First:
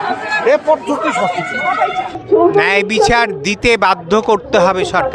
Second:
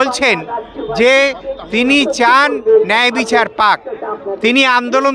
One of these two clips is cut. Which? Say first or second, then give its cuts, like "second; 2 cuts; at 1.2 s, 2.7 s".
first; 1 cut; at 2.2 s